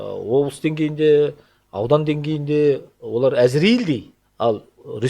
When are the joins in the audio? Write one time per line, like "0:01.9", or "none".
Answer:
0:04.2